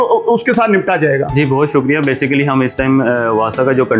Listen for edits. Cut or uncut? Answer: uncut